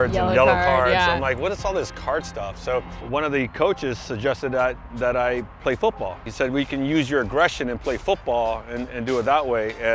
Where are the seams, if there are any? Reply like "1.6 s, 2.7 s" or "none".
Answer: 3.0 s, 6.3 s